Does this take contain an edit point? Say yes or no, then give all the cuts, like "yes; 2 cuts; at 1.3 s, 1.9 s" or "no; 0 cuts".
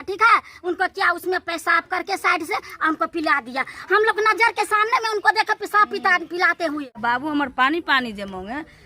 yes; 1 cut; at 6.9 s